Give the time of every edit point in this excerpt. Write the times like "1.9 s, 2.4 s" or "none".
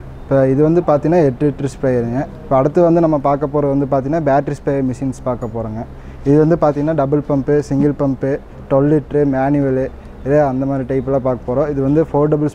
none